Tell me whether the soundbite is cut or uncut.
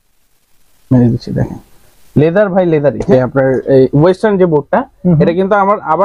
cut